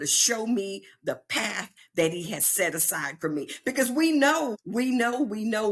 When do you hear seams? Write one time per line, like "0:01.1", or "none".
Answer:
0:04.6